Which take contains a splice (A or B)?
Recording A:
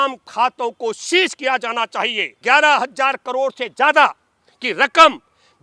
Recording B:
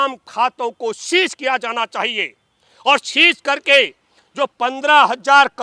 A